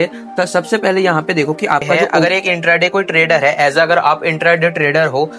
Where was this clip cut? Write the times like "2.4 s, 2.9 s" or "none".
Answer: 2.2 s